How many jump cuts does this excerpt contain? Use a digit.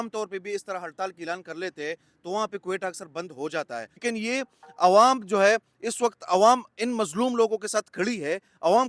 1